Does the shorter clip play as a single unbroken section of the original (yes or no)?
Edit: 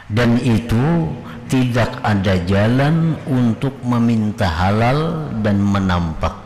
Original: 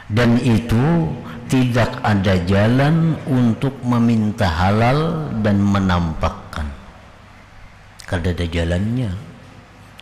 yes